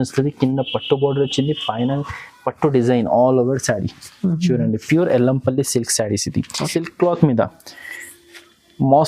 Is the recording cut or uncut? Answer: cut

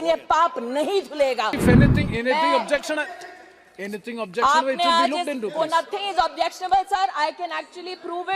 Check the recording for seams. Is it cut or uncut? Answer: cut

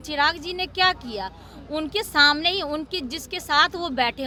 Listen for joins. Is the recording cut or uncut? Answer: uncut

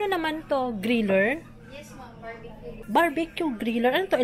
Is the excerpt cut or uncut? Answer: cut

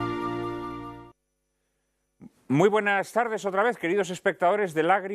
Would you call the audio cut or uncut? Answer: uncut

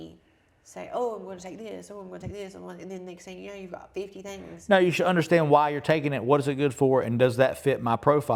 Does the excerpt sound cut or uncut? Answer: uncut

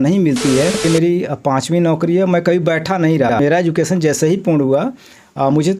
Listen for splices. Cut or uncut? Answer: cut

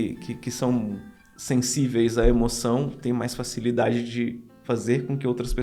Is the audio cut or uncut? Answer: uncut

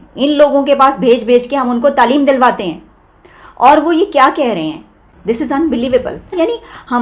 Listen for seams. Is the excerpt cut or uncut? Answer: uncut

